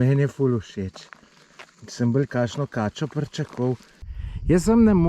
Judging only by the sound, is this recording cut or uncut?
cut